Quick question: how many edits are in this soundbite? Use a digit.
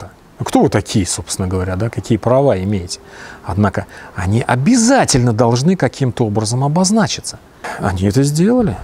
1